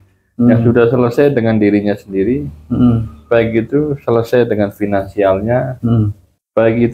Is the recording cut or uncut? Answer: uncut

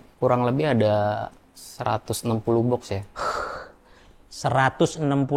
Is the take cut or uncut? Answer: uncut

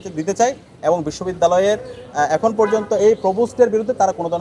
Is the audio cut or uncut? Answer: uncut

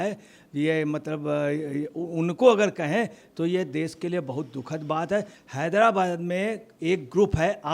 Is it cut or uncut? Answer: cut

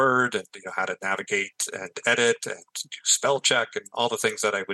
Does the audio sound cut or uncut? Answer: uncut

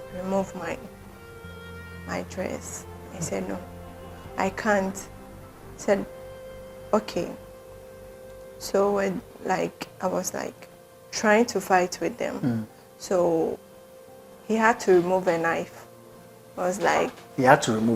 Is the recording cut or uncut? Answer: uncut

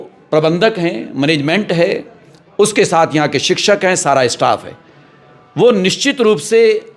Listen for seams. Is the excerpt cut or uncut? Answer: uncut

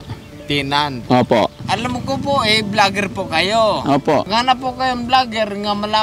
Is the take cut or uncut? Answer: cut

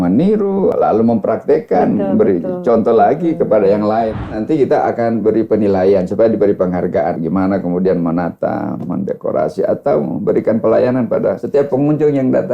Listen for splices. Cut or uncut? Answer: cut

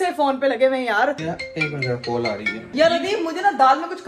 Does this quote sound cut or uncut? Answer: cut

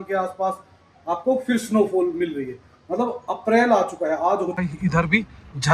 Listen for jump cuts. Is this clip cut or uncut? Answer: cut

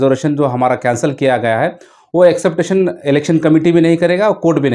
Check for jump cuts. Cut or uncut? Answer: uncut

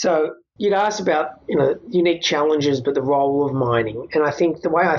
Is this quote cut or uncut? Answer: uncut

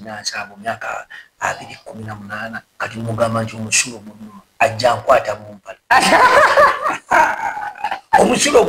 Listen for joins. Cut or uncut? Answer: cut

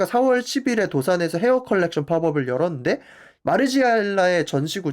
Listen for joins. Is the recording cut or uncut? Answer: cut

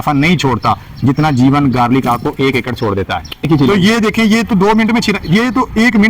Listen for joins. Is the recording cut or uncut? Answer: cut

